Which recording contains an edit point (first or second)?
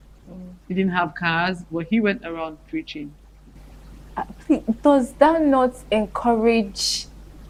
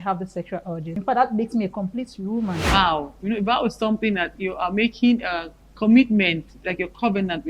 second